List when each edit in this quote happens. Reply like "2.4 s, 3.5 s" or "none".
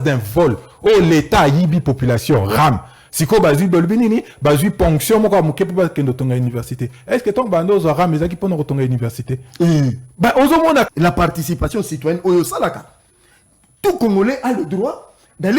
10.9 s